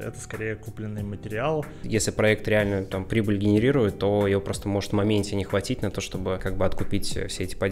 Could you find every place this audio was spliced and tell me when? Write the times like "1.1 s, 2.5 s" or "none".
1.8 s, 6.4 s